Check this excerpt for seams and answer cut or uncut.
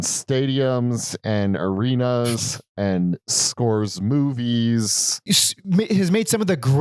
uncut